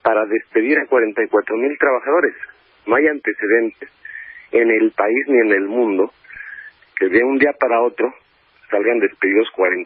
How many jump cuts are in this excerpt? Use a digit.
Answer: 1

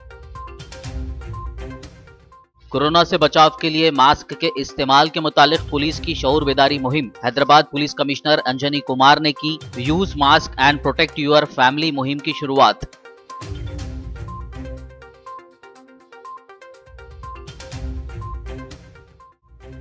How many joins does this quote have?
1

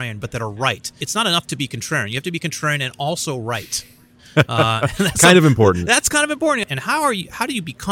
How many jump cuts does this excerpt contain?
2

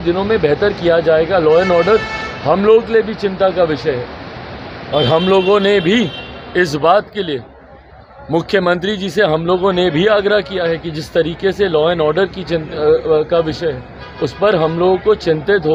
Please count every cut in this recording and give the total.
0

